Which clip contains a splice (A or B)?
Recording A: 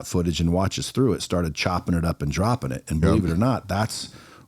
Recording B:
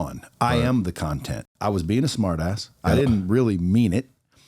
B